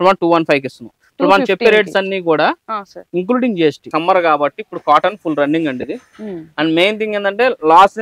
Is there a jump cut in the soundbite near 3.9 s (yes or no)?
yes